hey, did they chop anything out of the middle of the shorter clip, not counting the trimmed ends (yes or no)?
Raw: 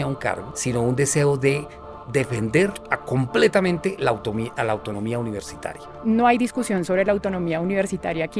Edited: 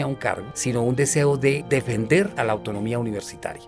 yes